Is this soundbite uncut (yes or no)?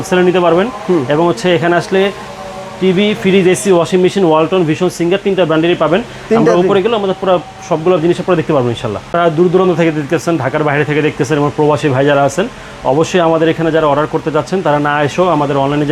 yes